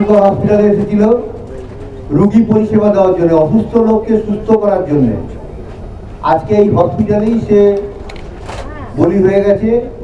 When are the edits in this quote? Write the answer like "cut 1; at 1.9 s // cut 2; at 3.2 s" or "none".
none